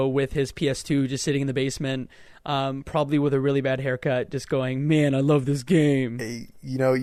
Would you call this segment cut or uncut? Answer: uncut